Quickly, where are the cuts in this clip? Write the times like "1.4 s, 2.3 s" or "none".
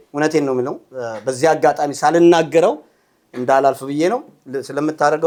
none